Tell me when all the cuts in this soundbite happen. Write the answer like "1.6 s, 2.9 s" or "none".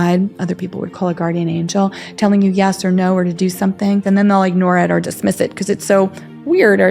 4.0 s